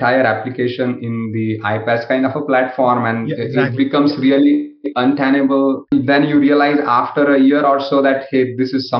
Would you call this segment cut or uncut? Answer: cut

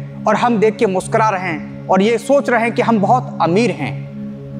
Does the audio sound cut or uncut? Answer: uncut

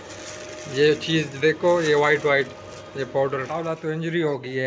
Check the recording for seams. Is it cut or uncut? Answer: cut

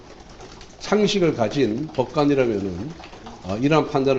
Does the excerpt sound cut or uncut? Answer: uncut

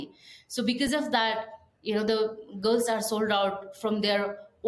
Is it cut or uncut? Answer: uncut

